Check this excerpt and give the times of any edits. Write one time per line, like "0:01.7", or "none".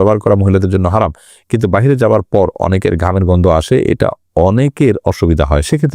none

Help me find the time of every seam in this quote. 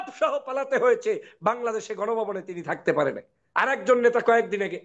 none

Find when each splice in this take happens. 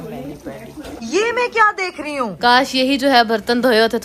0:01.0
0:02.3

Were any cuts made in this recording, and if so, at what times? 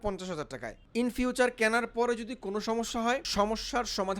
0:00.9
0:03.3

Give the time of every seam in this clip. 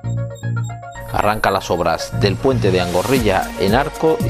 0:00.9

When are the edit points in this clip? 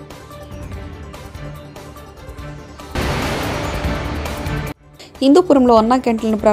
0:02.9
0:04.9

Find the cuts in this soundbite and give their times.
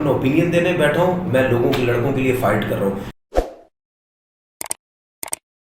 0:03.1

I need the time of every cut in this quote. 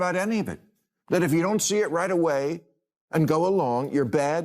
0:00.9

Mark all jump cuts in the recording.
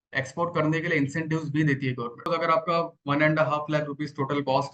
0:02.2

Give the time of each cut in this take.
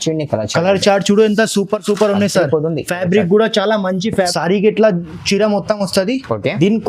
0:04.3

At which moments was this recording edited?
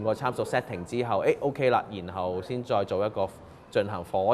none

